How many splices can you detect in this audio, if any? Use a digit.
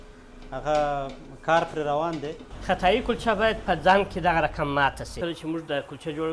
2